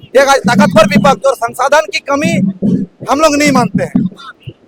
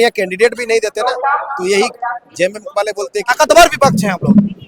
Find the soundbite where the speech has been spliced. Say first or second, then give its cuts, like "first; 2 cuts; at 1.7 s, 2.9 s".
second; 1 cut; at 3.3 s